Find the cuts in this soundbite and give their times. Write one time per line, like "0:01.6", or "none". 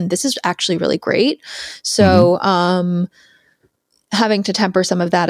none